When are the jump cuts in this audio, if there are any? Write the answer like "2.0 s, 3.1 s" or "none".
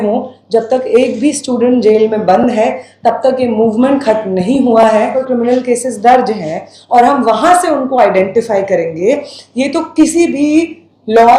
5.2 s